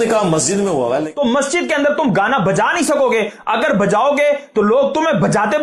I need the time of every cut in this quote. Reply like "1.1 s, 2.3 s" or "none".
1.1 s